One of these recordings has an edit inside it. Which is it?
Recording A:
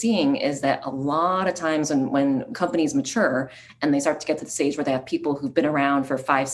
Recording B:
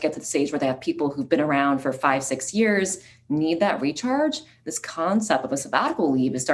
A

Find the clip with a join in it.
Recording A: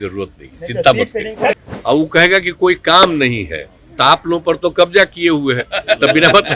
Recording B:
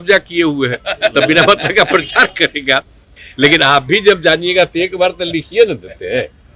A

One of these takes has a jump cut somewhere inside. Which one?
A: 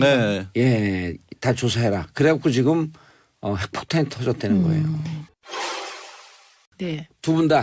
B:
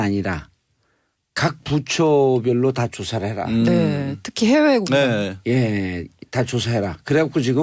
A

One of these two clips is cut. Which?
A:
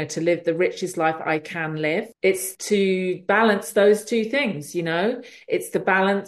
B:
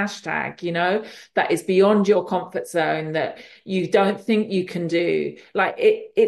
A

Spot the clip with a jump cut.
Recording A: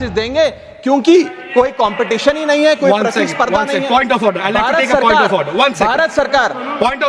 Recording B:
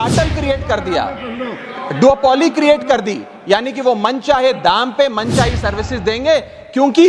A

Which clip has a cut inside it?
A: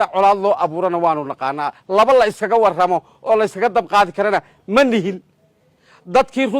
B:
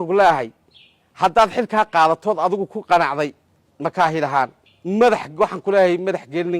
B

